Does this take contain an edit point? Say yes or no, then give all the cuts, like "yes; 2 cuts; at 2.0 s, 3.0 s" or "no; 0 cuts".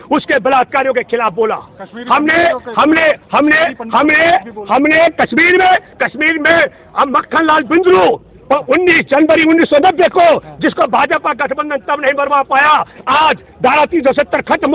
no; 0 cuts